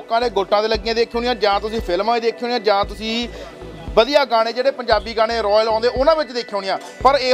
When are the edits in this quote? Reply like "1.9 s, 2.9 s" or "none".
none